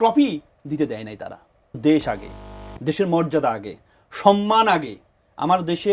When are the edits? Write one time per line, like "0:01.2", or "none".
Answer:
0:01.8